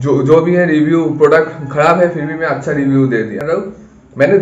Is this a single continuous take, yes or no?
no